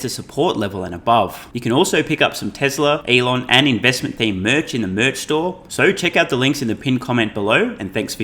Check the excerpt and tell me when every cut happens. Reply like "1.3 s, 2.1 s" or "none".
1.5 s, 3.0 s, 5.6 s